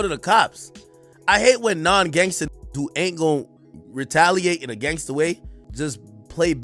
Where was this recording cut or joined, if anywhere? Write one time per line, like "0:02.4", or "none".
0:05.6